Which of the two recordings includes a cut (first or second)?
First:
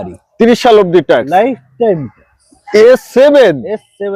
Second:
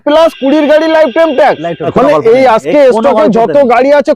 second